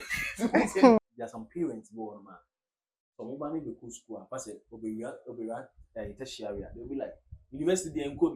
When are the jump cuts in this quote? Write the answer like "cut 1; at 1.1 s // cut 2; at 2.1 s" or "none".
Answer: cut 1; at 1.0 s